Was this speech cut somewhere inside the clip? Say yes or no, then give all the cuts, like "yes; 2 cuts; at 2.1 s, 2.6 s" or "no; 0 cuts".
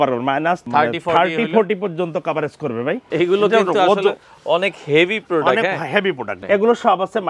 yes; 2 cuts; at 3.1 s, 6.3 s